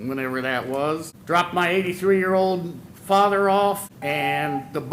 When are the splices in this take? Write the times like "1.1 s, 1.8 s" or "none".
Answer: 1.1 s, 3.9 s